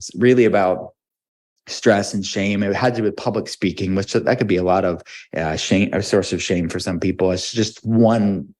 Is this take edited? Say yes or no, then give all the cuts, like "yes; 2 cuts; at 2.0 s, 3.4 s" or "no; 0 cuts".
no; 0 cuts